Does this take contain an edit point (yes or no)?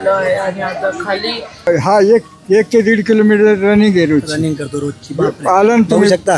yes